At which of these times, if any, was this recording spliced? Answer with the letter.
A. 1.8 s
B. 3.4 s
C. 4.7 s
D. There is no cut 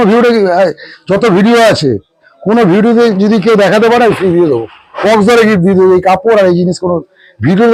D